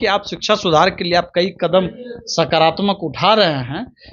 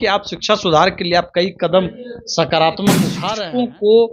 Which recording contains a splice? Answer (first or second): second